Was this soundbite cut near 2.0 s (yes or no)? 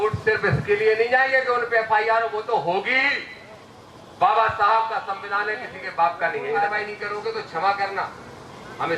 no